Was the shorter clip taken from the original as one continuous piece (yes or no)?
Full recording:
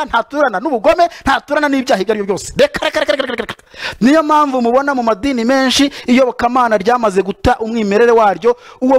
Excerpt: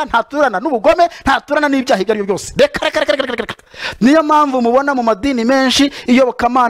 yes